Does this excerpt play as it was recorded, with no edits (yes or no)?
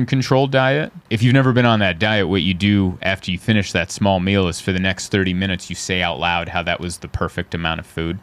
no